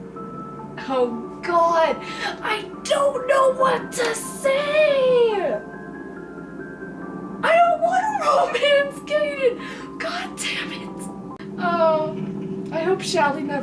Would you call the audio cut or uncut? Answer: cut